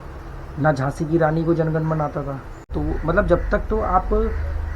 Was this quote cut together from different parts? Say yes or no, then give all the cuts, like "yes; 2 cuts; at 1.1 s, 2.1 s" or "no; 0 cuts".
yes; 1 cut; at 2.7 s